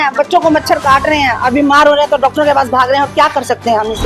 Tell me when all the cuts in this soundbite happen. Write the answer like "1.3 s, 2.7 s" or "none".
none